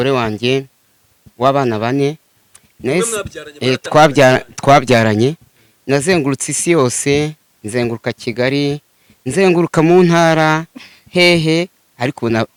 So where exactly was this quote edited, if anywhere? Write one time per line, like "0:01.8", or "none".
none